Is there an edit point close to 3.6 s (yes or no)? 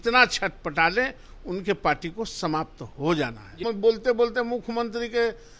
yes